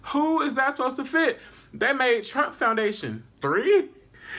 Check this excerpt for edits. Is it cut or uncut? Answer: cut